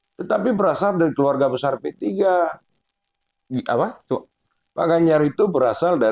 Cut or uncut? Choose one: uncut